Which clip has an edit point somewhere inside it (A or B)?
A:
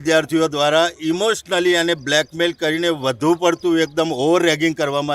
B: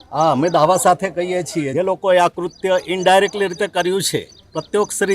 B